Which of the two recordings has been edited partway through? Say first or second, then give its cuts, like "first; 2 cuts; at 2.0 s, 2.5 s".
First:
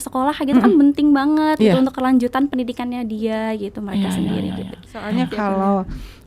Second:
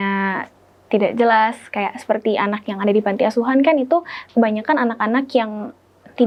first; 1 cut; at 5.1 s